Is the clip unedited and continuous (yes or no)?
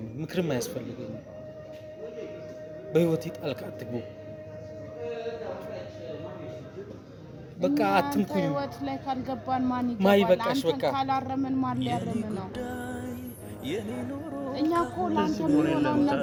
yes